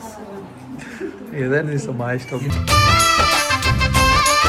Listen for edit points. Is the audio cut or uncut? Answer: uncut